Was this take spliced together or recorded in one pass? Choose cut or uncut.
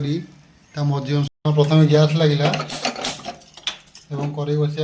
cut